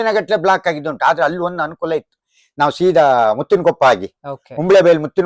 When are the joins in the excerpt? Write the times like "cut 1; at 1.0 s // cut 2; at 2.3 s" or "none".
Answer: none